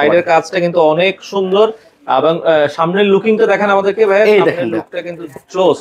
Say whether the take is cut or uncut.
uncut